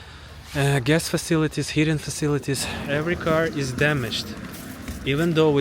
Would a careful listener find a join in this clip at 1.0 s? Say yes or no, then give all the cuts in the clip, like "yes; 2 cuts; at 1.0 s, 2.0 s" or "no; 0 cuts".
no; 1 cut; at 2.7 s